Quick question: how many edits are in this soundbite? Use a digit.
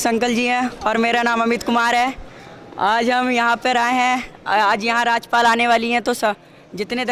0